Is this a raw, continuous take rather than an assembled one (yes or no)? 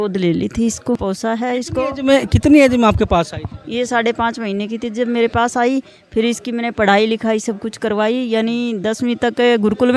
no